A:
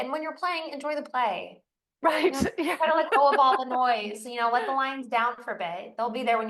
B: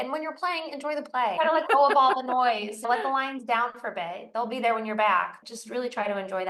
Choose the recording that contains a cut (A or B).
B